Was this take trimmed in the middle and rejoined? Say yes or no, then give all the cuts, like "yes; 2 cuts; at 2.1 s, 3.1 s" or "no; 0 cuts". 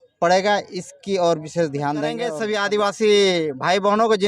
yes; 1 cut; at 2.3 s